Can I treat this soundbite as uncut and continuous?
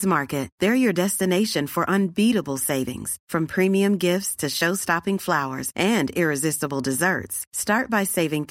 yes; 0 cuts

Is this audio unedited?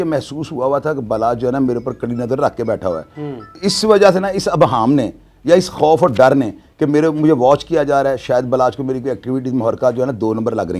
yes; 0 cuts

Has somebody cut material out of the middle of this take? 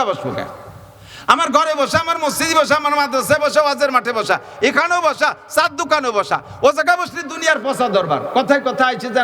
no; 0 cuts

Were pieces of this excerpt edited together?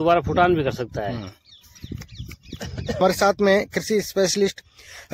yes; 1 cut; at 3.0 s

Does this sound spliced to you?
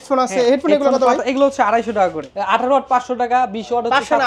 yes; 1 cut; at 2.3 s

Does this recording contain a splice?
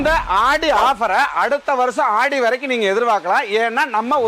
no; 0 cuts

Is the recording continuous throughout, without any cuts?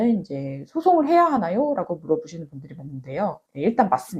yes; 0 cuts

